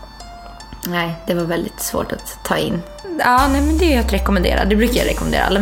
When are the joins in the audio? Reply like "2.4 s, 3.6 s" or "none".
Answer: 3.0 s